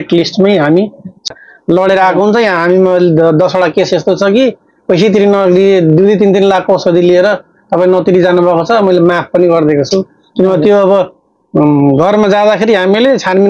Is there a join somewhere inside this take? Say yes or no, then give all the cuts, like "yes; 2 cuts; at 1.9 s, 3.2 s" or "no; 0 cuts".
yes; 1 cut; at 1.3 s